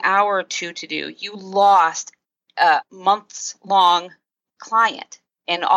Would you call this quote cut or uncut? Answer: uncut